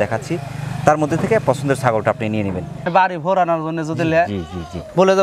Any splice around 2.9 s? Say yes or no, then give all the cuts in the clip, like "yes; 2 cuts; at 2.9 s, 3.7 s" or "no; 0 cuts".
yes; 1 cut; at 2.9 s